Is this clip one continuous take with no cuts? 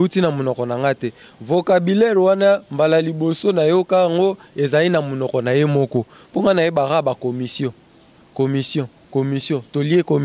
yes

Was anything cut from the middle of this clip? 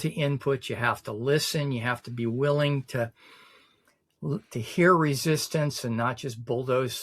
no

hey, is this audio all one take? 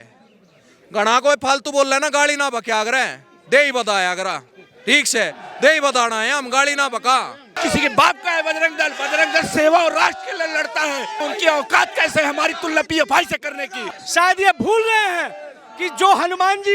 no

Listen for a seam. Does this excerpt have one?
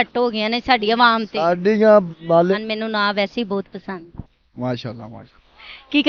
yes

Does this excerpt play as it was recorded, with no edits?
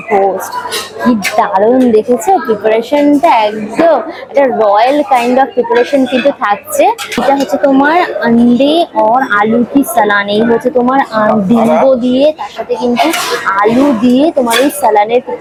yes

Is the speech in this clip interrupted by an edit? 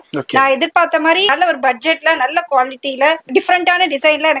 yes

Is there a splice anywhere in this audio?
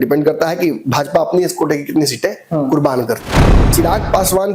yes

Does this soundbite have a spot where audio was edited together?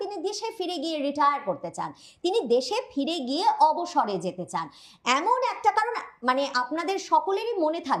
no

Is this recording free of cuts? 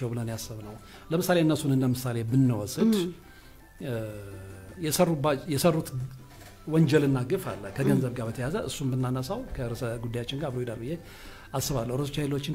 yes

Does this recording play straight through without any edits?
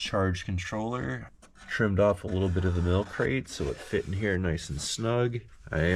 yes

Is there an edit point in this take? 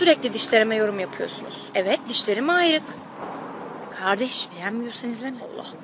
no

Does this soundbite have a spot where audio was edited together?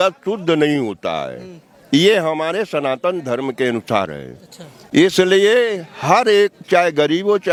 no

